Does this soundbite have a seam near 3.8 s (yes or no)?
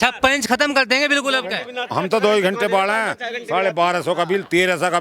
no